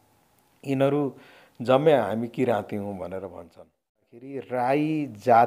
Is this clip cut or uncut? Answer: cut